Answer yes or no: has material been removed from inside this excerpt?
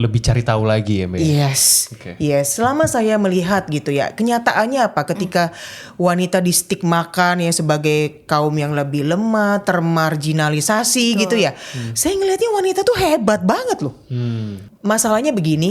yes